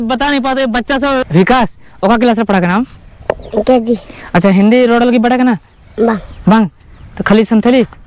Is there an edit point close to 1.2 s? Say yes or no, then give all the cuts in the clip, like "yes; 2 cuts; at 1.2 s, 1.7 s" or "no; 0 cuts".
yes; 1 cut; at 1.2 s